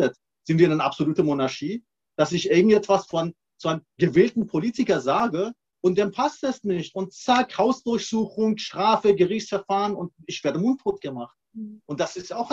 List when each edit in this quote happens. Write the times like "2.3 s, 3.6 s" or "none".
none

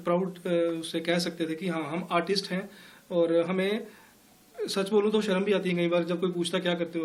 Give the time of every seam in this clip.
none

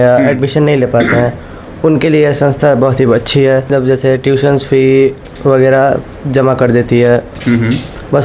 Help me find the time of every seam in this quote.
3.7 s

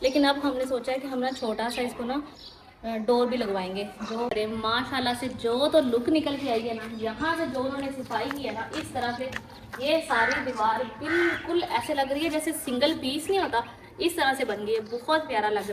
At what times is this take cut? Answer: none

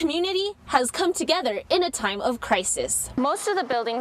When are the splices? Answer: 3.0 s

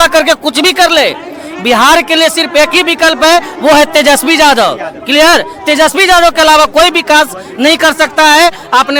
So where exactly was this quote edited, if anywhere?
none

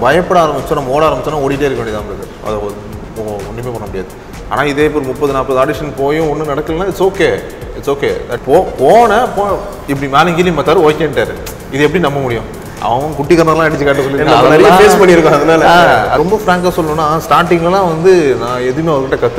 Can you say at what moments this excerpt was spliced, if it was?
4.3 s, 8.3 s, 16.2 s

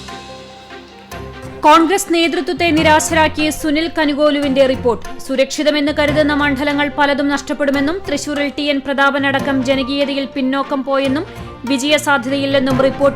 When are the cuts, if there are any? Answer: 1.6 s

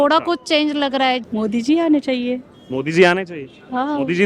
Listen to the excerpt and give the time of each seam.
1.2 s

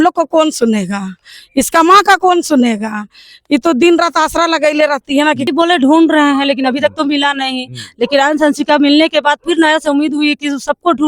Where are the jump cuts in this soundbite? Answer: 5.5 s

